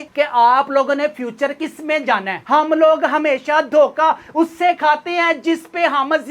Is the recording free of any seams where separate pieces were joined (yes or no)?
no